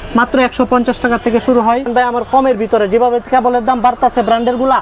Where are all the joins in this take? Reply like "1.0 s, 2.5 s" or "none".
1.9 s